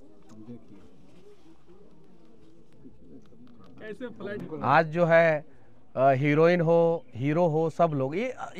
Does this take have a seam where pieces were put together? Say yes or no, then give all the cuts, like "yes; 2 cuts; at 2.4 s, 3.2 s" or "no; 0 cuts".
yes; 1 cut; at 4.5 s